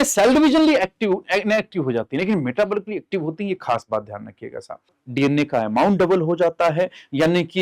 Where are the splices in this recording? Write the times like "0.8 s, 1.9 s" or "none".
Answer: 5.0 s